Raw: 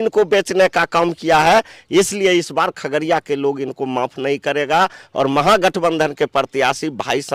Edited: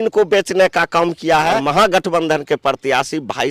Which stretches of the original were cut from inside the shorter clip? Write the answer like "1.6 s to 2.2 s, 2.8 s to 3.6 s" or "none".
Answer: 1.6 s to 5.3 s